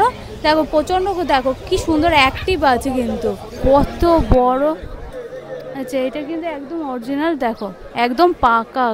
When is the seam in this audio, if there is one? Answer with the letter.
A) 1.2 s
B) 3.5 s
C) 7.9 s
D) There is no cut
B